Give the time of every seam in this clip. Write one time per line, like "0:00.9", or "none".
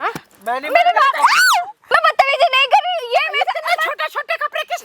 0:01.8